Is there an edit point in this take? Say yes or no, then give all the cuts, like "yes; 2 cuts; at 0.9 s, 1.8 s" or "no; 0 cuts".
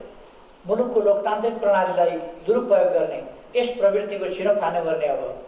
no; 0 cuts